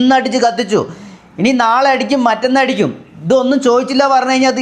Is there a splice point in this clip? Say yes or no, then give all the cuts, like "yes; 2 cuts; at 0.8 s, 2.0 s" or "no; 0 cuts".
no; 0 cuts